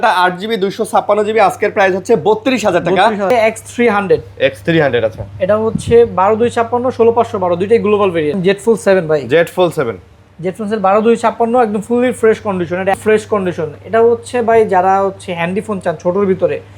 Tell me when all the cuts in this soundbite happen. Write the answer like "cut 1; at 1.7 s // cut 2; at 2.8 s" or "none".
cut 1; at 3.3 s // cut 2; at 8.4 s // cut 3; at 12.9 s